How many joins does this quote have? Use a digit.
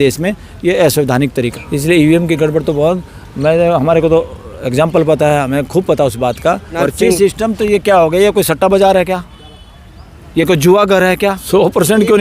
3